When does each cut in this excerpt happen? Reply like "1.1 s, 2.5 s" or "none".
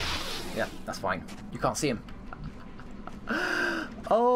1.4 s

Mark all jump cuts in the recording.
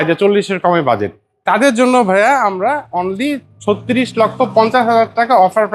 none

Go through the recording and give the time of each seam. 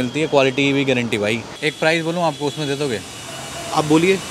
1.6 s

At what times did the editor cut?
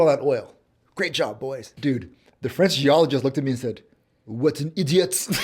1.7 s

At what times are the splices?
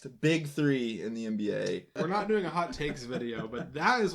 1.9 s

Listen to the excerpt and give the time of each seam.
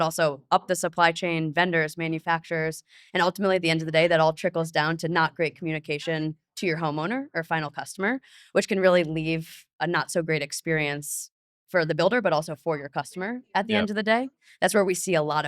14.4 s

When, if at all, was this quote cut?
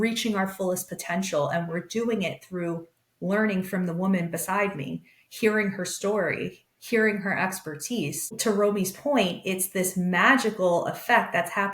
8.4 s

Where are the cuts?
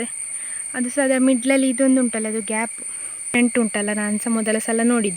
3.3 s

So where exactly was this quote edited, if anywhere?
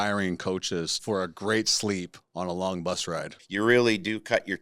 1.0 s, 2.2 s, 3.4 s

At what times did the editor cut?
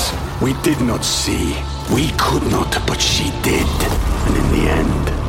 none

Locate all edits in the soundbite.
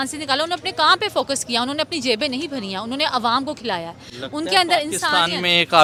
none

